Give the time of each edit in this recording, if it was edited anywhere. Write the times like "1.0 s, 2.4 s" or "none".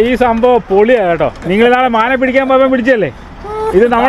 none